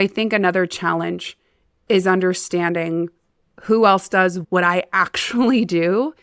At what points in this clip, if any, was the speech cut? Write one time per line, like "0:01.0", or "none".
0:04.4